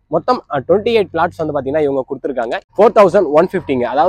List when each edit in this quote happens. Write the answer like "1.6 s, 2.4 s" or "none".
2.6 s